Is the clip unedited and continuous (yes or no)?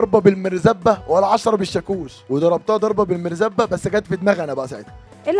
yes